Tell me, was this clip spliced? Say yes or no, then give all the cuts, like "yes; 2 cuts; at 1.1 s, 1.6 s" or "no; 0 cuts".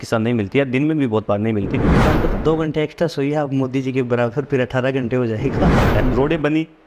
yes; 2 cuts; at 2.0 s, 5.9 s